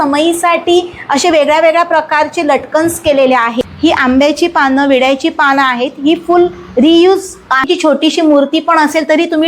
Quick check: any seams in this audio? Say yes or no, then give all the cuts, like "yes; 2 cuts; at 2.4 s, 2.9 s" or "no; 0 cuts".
yes; 2 cuts; at 3.6 s, 7.6 s